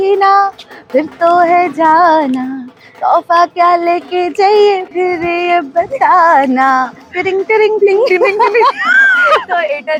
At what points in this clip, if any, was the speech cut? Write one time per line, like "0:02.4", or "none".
none